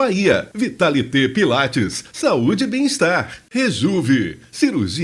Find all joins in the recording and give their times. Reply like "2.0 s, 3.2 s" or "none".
3.4 s

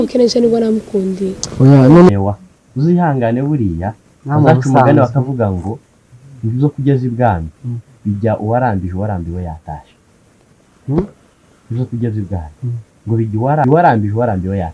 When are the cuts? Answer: 2.1 s, 13.6 s

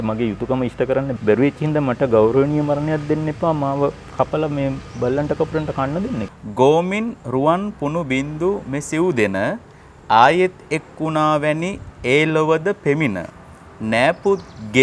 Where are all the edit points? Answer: 1.1 s, 6.4 s

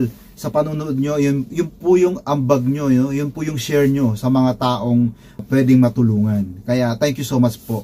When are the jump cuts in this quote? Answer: 5.4 s

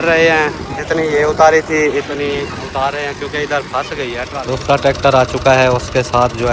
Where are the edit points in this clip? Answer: 4.3 s

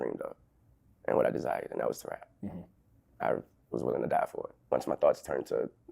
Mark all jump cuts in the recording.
4.5 s

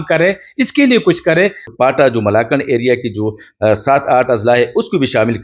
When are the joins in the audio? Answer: 1.7 s

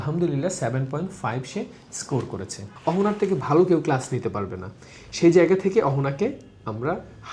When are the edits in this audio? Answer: 2.7 s

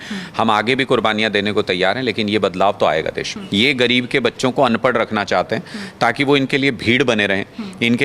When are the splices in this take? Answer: 3.4 s

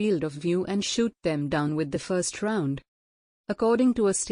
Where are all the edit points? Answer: 3.1 s

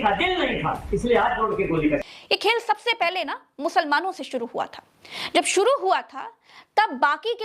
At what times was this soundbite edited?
2.0 s

